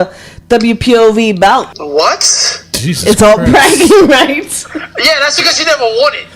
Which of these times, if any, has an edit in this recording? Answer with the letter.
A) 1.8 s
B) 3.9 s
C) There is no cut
A